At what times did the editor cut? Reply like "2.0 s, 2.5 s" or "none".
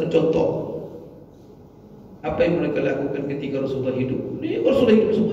none

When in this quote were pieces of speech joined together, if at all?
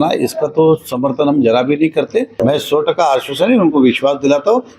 2.3 s

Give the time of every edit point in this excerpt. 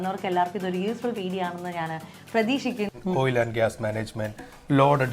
2.9 s

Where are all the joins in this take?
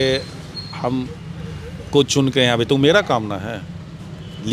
none

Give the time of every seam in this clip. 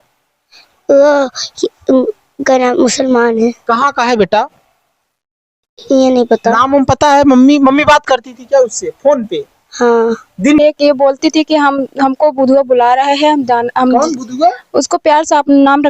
10.6 s

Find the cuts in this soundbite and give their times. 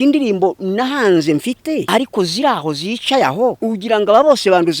1.8 s, 3.6 s

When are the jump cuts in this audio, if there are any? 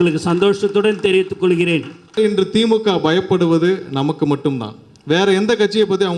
2.2 s

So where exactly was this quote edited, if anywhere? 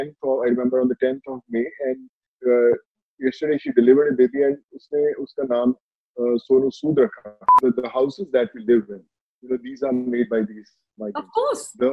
7.4 s

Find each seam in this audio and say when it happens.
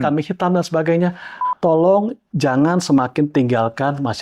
1.4 s

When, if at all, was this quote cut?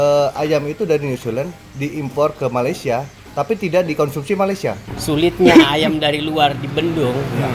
4.8 s

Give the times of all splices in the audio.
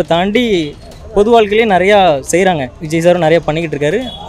2.7 s

